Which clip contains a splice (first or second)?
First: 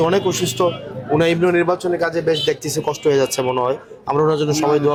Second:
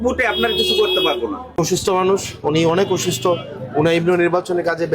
second